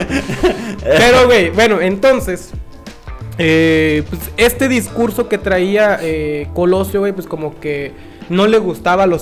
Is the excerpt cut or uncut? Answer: uncut